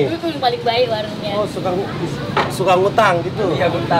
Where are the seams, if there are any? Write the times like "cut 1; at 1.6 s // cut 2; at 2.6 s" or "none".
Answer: none

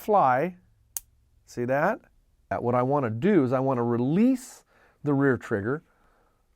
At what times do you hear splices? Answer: cut 1; at 2.6 s

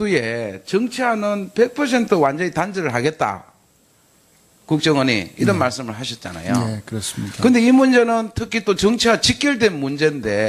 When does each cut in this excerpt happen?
cut 1; at 9.5 s

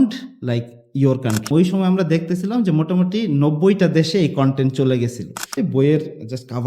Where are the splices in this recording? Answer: cut 1; at 1.5 s // cut 2; at 5.5 s

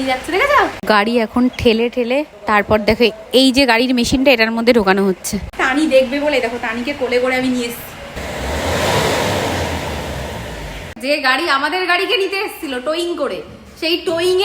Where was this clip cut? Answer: cut 1; at 0.8 s // cut 2; at 2.4 s // cut 3; at 5.6 s // cut 4; at 8.1 s // cut 5; at 11.0 s

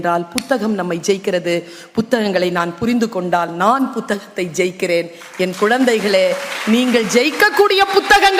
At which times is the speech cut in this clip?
none

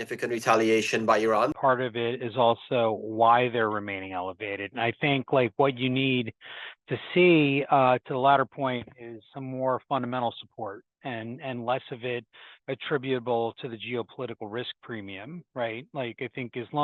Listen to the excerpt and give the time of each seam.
cut 1; at 1.5 s

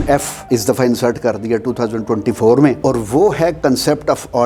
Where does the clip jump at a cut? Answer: none

